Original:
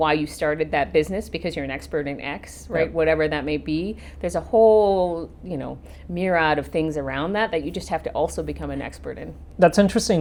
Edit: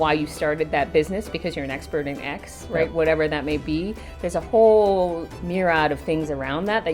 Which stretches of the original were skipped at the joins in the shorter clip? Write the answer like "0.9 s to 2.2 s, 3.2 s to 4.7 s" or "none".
5.3 s to 6.0 s